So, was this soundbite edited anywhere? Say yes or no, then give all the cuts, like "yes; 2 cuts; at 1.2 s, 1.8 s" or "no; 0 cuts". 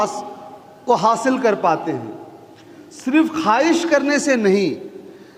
no; 0 cuts